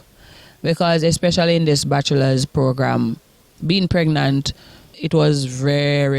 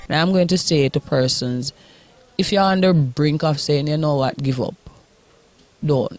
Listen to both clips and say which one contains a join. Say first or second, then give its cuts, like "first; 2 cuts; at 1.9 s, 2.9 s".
first; 1 cut; at 4.9 s